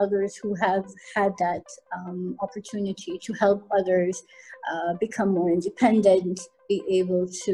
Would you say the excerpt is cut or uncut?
uncut